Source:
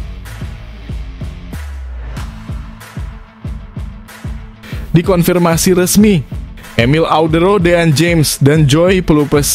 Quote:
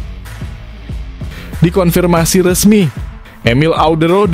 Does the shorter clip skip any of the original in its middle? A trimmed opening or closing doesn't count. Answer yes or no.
yes